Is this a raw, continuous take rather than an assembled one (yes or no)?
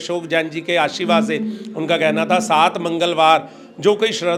yes